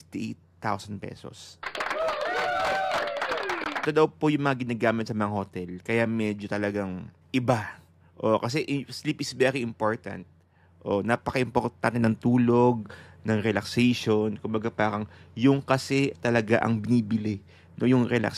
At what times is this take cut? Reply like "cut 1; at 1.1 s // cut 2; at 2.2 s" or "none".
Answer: cut 1; at 3.8 s // cut 2; at 7.1 s